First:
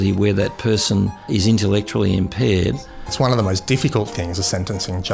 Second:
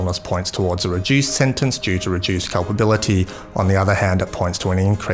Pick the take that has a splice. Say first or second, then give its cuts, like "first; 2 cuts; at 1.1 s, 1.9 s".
first; 2 cuts; at 1.3 s, 3.0 s